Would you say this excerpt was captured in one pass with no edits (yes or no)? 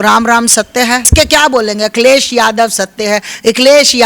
no